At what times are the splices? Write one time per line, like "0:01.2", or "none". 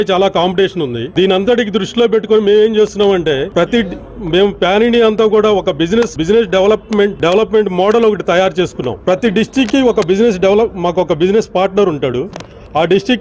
0:01.0
0:03.5
0:06.2
0:07.2
0:08.9